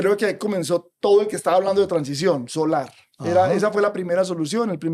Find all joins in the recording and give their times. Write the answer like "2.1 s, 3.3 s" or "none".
none